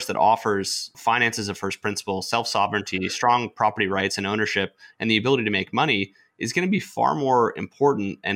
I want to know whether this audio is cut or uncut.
cut